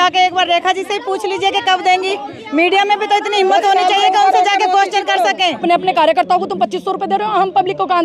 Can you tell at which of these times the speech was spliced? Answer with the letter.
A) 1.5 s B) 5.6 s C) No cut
B